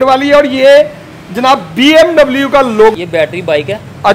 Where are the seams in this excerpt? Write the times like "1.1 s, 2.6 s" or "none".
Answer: 2.9 s